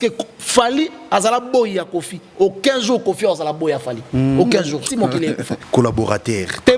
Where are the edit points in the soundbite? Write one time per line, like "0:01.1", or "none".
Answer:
0:05.5